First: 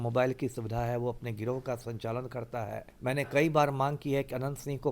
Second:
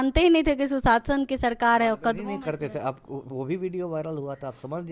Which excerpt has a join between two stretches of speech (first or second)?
first